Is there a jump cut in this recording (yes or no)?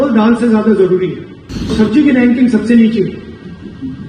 yes